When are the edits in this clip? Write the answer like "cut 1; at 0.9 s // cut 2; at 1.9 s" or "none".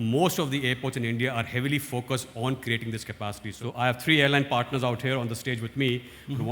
cut 1; at 3.5 s